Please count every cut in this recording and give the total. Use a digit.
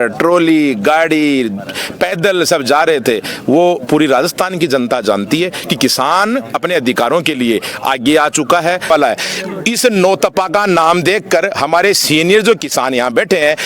1